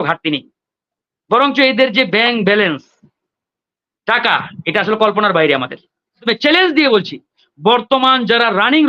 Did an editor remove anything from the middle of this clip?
yes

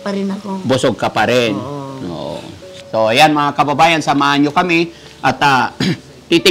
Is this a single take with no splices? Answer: no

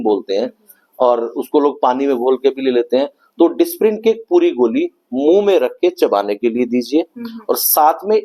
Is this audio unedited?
yes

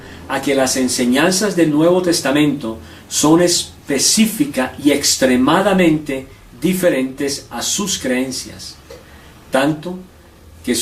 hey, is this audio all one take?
yes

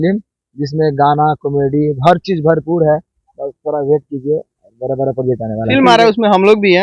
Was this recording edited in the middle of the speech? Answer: yes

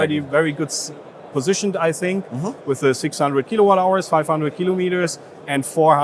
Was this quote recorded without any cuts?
yes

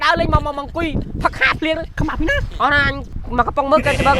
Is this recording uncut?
no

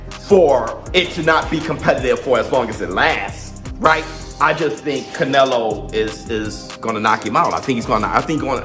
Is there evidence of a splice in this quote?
no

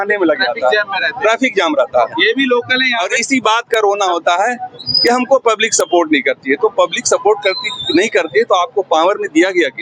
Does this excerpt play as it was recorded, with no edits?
yes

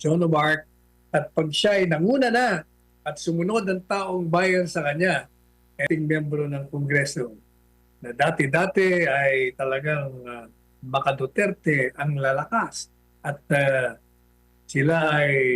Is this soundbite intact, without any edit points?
no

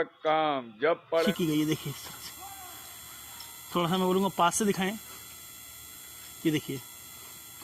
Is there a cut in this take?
yes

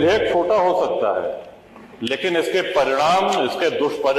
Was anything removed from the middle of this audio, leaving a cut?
no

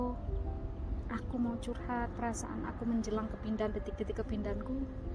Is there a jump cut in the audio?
no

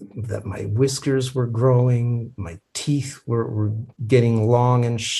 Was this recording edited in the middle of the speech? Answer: yes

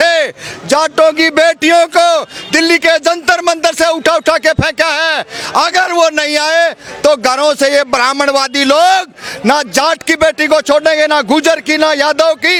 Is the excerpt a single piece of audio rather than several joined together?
yes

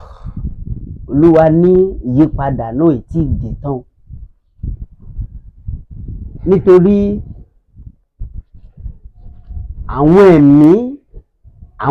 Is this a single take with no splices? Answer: yes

